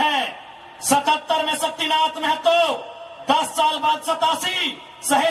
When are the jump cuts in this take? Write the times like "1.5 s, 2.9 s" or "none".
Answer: none